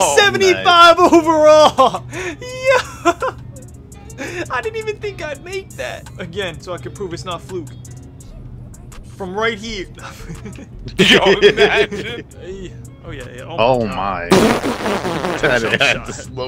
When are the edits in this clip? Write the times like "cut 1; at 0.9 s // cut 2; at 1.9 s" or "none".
none